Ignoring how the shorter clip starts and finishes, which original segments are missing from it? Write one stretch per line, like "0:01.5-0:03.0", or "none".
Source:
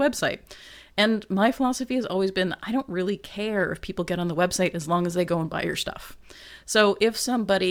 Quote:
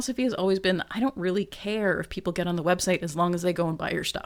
none